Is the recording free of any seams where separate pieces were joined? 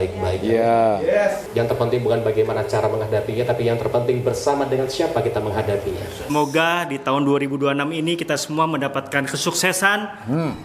no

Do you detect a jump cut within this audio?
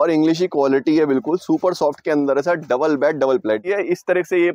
yes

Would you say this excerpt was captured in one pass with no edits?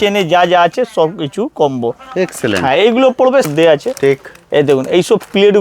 no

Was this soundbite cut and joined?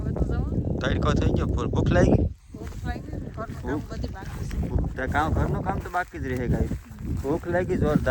no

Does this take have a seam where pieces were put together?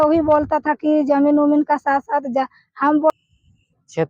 yes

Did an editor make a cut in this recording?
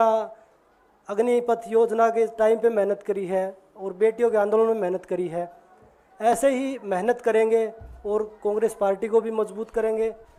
no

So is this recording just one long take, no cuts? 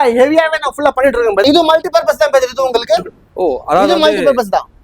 no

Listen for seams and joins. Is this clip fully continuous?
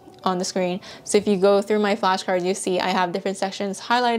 yes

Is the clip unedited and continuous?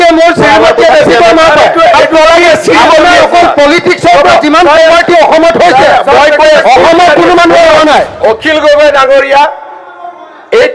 no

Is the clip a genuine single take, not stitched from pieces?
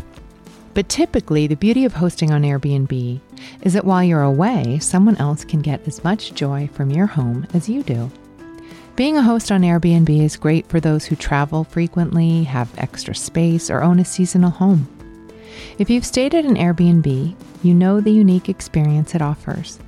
yes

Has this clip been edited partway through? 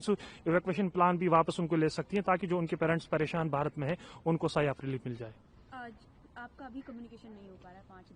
no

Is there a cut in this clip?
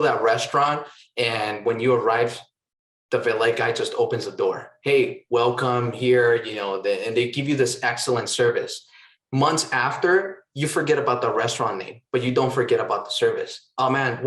no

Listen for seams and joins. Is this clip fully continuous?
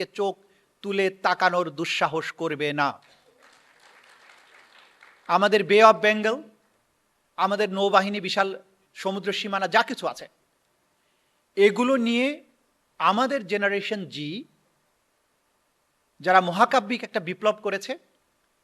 yes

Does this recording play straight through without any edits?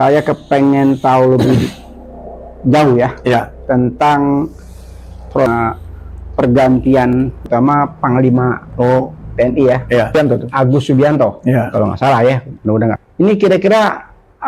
no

